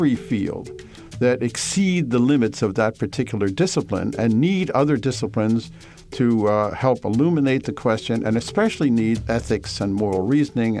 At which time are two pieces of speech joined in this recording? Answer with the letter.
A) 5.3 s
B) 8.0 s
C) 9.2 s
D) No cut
C